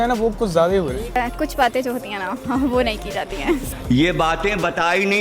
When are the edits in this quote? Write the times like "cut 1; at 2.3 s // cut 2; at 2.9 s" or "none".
cut 1; at 1.2 s // cut 2; at 3.7 s